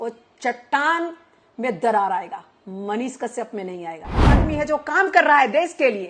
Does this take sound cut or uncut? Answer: cut